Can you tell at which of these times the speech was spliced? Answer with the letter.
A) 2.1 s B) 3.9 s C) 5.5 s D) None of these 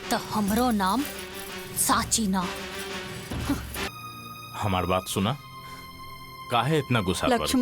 B